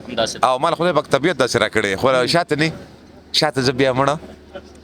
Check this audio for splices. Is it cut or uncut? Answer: uncut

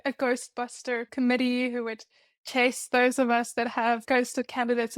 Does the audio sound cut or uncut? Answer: cut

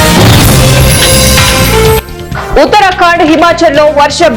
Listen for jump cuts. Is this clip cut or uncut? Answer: uncut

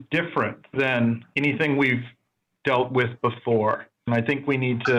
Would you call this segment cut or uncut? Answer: cut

